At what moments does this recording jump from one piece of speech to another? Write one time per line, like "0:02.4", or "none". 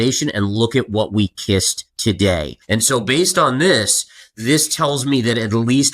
0:01.8
0:02.6